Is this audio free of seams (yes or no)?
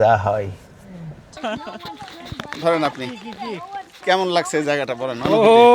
no